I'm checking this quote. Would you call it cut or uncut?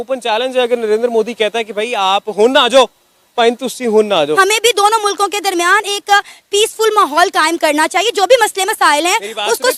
uncut